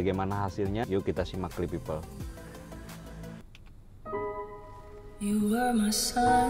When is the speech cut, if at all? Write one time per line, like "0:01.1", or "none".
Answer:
0:00.8
0:03.4